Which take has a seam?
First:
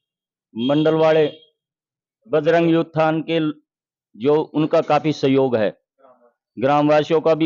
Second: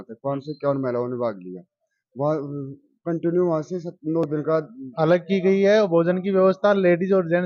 second; 1 cut; at 4.8 s

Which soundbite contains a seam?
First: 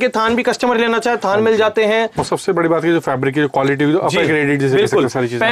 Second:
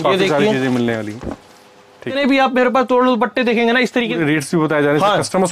second; 2 cuts; at 2.2 s, 4.2 s

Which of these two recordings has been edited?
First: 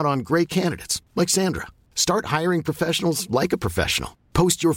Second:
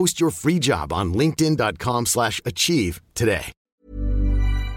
second; 1 cut; at 3.7 s

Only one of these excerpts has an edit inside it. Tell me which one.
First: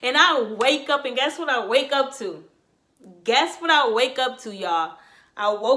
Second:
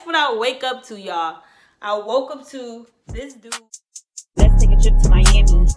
second; 1 cut; at 3.4 s

